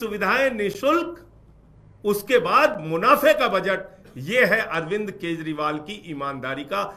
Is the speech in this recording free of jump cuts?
yes; 0 cuts

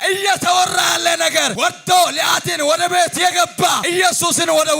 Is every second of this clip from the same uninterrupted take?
no; 2 cuts; at 1.5 s, 3.8 s

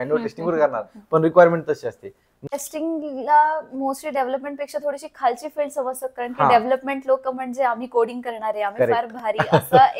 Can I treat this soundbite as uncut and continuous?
no; 1 cut; at 2.5 s

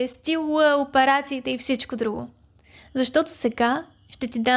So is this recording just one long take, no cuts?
yes; 0 cuts

